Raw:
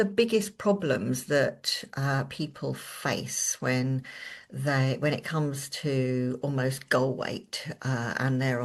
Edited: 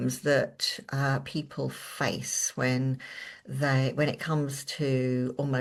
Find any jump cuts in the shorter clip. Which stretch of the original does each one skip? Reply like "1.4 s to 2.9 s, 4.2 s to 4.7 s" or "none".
none